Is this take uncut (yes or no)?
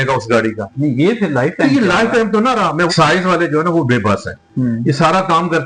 no